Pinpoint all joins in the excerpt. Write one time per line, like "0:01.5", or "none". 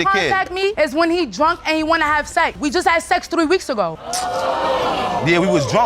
0:02.6